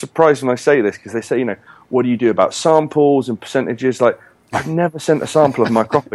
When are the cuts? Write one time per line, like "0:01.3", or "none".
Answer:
none